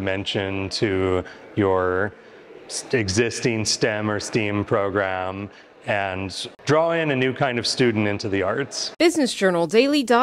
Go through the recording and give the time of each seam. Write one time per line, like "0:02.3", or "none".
0:08.8